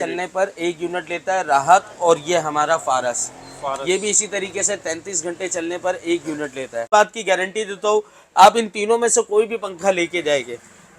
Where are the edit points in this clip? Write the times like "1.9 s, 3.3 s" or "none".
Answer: 6.9 s

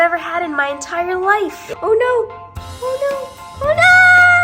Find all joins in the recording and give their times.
1.7 s

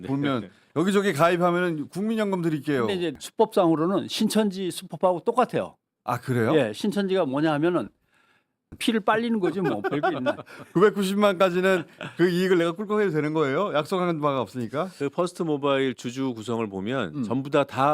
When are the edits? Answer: 3.2 s, 8.7 s

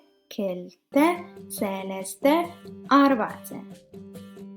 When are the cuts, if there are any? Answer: none

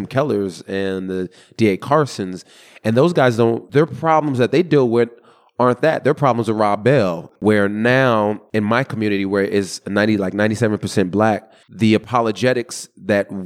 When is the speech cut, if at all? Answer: 3.6 s, 7.3 s

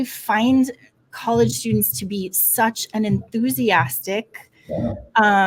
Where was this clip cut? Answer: none

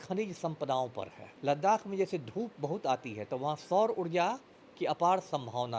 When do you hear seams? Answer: 1.2 s

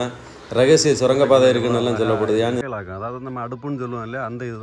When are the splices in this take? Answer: 2.6 s

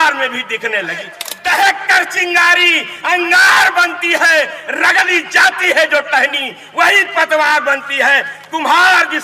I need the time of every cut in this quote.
1.2 s

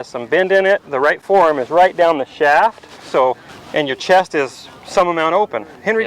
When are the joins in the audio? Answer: 3.5 s

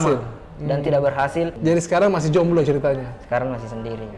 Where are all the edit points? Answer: 1.5 s

